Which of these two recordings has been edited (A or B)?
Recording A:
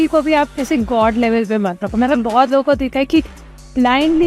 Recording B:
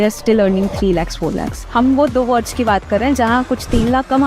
B